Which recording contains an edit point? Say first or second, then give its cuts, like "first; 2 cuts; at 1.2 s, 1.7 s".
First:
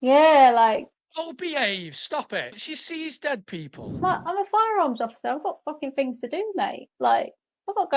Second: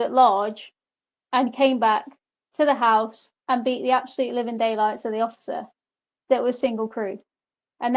first; 3 cuts; at 1.0 s, 2.6 s, 4.0 s